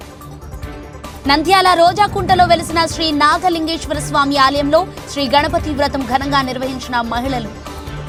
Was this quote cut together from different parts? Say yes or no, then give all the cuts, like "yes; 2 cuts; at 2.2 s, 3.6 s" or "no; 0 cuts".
no; 0 cuts